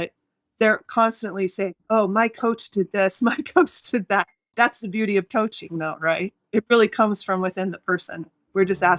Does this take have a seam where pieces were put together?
yes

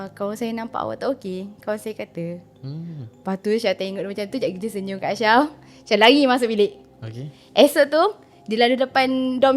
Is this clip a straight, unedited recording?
yes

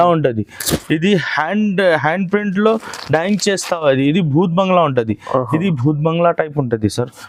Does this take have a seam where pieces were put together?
no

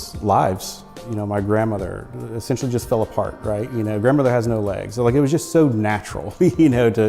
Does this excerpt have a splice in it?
yes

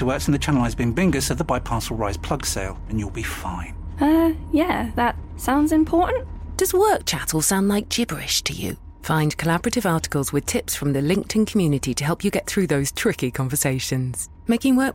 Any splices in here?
no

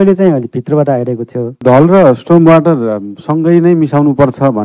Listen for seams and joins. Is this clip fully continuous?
no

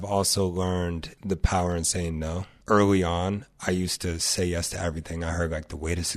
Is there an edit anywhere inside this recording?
yes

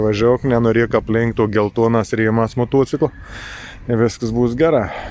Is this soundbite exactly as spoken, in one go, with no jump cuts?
yes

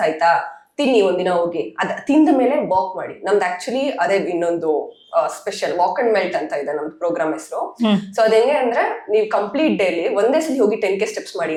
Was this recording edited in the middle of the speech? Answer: no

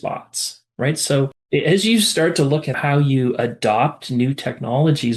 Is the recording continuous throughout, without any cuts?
no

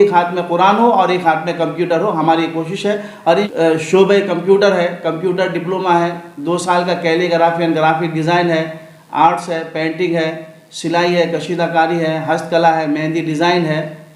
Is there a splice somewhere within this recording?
yes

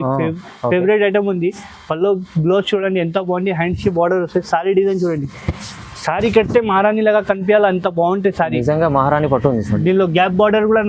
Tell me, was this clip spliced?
no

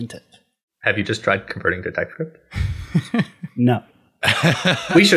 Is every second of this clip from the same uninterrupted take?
yes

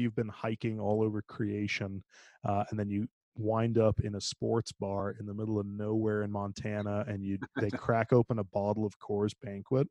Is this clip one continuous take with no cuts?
yes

